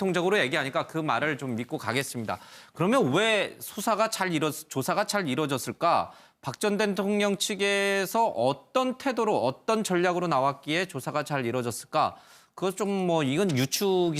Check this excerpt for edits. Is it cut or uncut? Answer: uncut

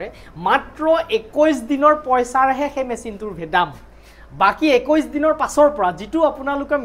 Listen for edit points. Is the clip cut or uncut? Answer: uncut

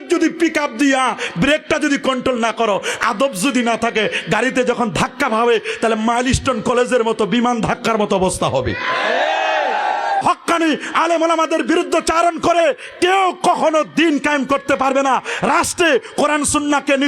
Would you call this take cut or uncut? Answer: cut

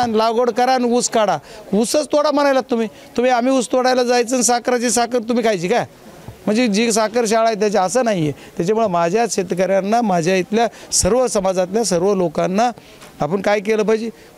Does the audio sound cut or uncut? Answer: uncut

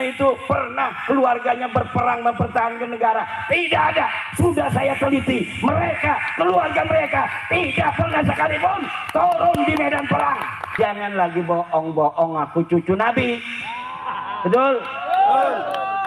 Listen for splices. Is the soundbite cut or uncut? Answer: cut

